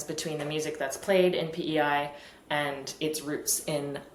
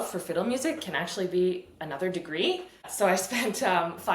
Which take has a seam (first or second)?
second